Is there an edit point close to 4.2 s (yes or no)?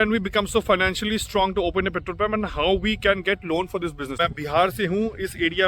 yes